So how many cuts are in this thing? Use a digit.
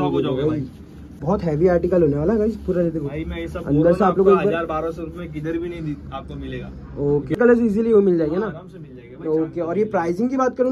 2